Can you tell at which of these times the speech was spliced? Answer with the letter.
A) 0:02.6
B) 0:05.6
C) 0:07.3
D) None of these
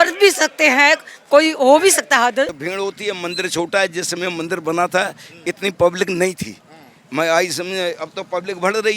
A